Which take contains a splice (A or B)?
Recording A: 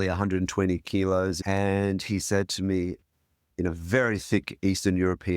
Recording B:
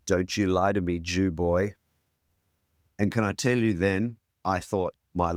A